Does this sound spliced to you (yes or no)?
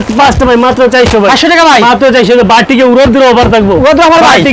no